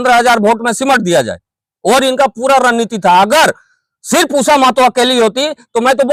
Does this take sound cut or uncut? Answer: uncut